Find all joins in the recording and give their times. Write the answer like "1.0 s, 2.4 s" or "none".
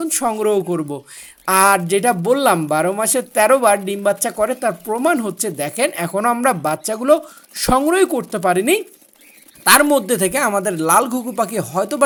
none